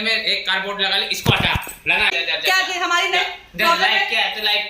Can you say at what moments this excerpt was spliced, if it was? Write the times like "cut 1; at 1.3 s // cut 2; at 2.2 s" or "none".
cut 1; at 2.2 s